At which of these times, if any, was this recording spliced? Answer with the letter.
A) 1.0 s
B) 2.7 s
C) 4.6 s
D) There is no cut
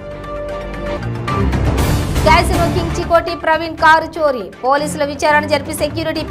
D